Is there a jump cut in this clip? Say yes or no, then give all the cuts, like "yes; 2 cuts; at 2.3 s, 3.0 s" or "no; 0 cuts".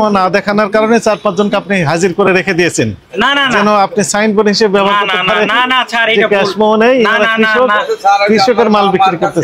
no; 0 cuts